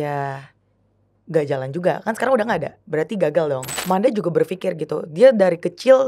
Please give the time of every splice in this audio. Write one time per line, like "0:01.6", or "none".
0:03.7